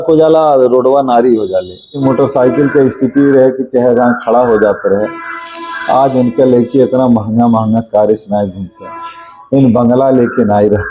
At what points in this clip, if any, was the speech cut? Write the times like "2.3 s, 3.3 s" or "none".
2.0 s